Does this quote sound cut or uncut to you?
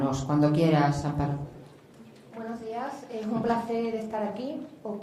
uncut